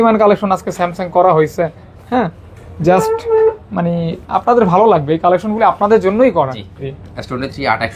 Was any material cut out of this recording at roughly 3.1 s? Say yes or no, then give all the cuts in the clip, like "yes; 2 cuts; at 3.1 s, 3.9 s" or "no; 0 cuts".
no; 1 cut; at 6.9 s